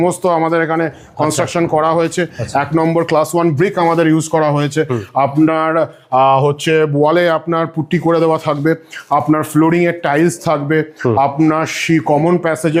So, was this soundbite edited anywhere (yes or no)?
no